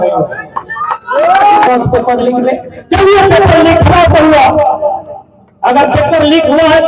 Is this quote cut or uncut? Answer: cut